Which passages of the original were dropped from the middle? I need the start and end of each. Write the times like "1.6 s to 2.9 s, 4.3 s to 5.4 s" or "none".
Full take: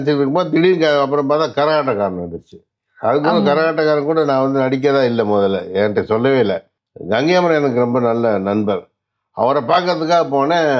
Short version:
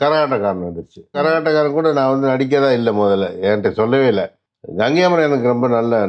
2.7 s to 3.5 s